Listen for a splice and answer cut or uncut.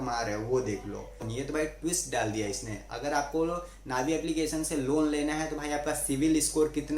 cut